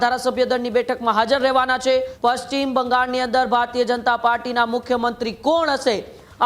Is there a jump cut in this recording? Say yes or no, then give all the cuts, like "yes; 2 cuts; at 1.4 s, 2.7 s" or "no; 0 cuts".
yes; 1 cut; at 2.1 s